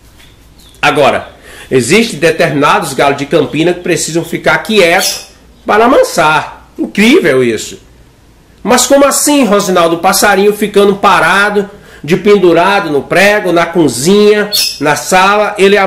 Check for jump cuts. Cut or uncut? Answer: uncut